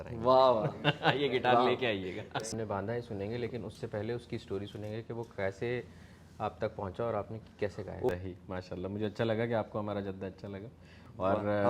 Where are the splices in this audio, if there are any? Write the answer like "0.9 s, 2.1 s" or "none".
2.5 s, 8.1 s

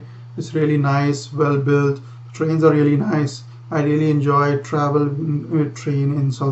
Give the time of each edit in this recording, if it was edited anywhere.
none

